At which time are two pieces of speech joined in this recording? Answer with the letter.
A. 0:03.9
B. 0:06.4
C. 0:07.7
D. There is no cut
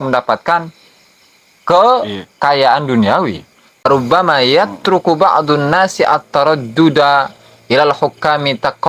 A